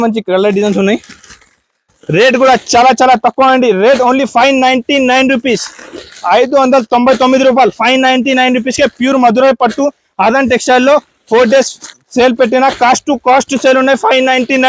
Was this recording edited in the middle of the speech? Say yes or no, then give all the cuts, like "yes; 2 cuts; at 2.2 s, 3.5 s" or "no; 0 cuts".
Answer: no; 0 cuts